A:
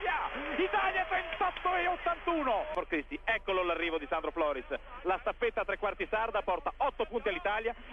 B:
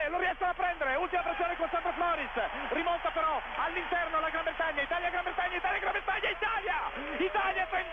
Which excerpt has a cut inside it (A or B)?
A